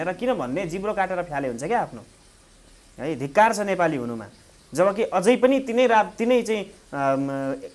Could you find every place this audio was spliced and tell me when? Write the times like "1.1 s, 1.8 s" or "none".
none